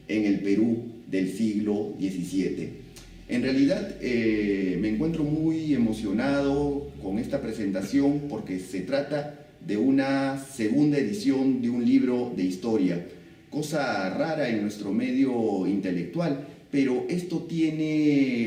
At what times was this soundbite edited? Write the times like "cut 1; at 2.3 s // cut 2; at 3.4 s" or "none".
none